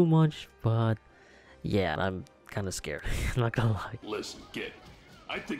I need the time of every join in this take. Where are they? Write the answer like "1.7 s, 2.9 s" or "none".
2.0 s, 3.9 s